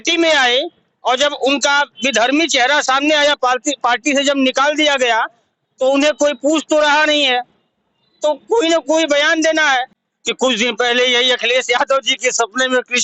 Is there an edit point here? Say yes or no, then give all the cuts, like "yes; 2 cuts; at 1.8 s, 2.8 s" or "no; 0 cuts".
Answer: yes; 1 cut; at 10.0 s